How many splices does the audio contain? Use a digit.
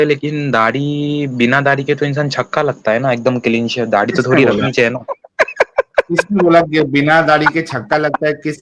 0